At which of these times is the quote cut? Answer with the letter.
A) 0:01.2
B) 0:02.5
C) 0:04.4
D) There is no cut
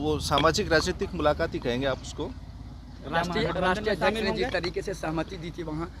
D